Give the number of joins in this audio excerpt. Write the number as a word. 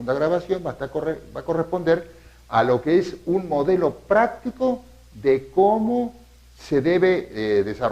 one